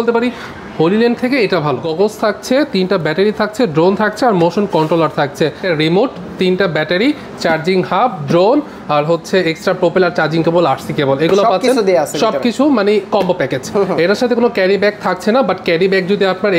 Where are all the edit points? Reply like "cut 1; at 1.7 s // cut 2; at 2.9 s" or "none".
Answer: cut 1; at 1.9 s // cut 2; at 5.6 s